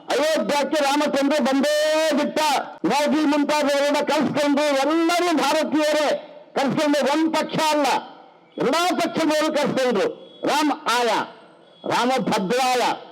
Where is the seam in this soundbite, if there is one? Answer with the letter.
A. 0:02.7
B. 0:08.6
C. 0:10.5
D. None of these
A